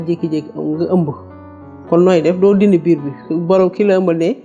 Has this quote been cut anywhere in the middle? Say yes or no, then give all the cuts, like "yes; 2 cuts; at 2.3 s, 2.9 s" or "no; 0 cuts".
no; 0 cuts